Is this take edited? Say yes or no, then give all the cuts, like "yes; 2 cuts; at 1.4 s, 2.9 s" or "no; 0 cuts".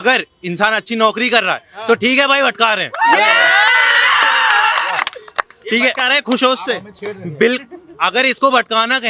no; 0 cuts